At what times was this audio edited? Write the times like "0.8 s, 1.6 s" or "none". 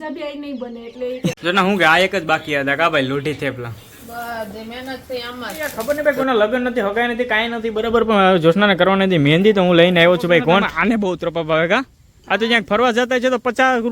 1.4 s, 5.8 s, 10.7 s

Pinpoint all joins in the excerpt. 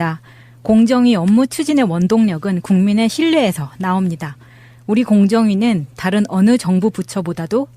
6.2 s

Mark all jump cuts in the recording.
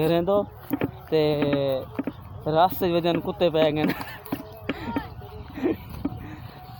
none

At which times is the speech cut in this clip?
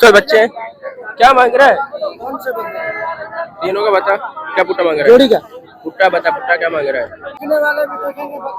7.4 s

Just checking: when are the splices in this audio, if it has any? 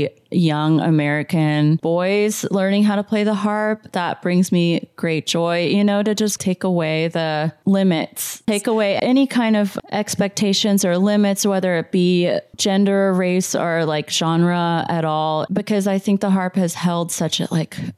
1.8 s, 8.4 s

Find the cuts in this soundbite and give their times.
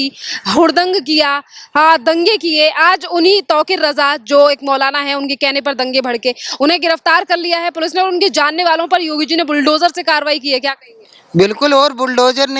none

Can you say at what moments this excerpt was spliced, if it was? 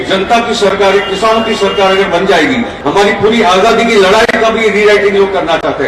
2.8 s

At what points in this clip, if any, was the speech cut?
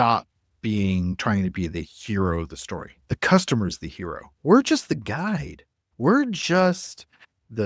1.9 s

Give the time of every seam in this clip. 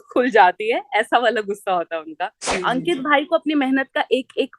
2.4 s

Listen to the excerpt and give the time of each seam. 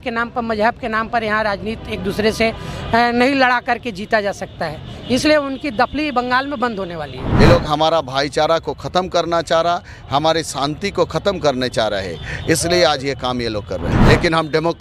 7.2 s, 13.9 s

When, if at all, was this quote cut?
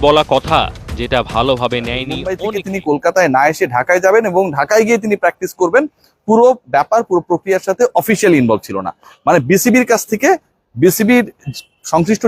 2.4 s

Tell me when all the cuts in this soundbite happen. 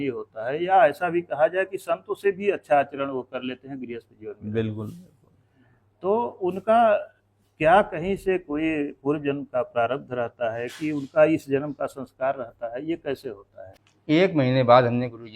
13.8 s

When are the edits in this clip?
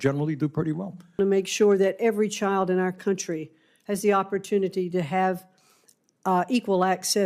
1.2 s

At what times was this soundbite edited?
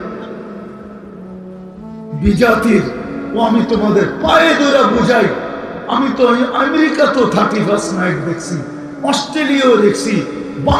none

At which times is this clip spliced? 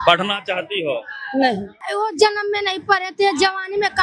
1.8 s

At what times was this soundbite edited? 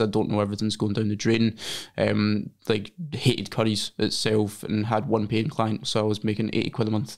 none

